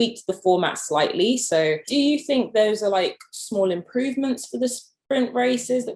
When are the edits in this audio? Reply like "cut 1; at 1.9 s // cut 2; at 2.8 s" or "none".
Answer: cut 1; at 1.8 s